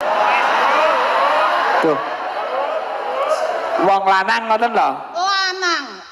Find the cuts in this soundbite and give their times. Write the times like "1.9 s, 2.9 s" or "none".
none